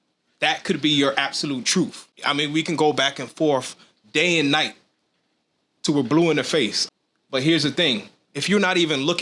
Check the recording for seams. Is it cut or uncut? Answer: cut